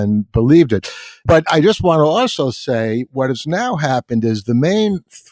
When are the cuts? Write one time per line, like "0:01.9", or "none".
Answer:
0:01.2